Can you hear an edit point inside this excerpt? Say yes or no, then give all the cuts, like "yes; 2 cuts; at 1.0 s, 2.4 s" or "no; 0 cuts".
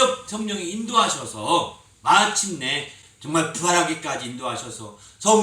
yes; 1 cut; at 3.1 s